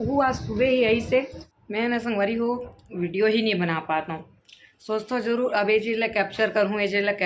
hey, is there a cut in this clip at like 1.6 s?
yes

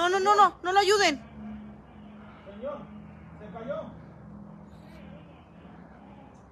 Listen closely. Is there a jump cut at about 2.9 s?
no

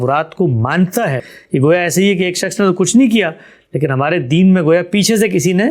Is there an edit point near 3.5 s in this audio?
no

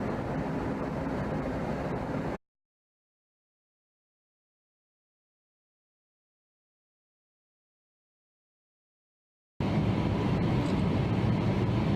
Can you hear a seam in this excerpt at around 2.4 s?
no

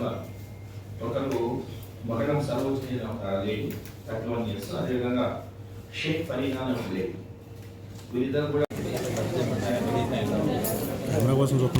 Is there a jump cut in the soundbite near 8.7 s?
yes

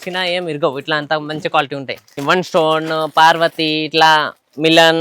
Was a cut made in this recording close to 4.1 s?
no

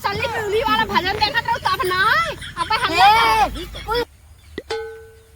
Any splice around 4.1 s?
yes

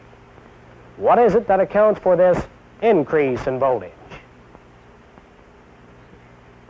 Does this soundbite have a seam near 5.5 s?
yes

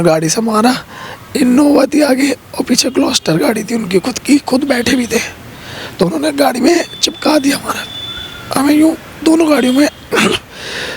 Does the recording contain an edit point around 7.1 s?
no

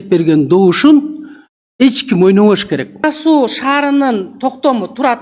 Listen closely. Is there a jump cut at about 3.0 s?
yes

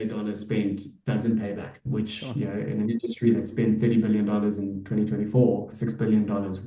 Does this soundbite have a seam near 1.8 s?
yes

